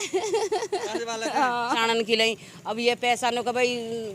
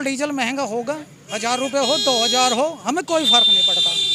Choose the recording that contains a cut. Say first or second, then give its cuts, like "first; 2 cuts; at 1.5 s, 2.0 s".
first; 1 cut; at 1.8 s